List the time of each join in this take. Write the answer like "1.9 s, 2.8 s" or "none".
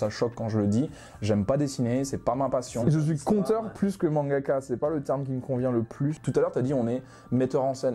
2.8 s, 6.2 s

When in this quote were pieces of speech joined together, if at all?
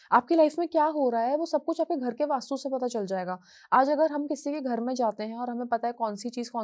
none

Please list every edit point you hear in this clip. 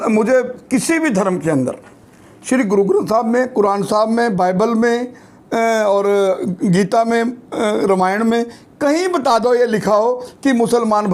none

